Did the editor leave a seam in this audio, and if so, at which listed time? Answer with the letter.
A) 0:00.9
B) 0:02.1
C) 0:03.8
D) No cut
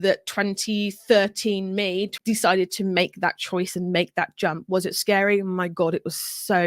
B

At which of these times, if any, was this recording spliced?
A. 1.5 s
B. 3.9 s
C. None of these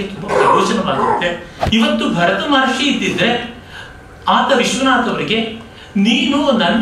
A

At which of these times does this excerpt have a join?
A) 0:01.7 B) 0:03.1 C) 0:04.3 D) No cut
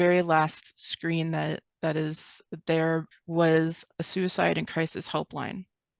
B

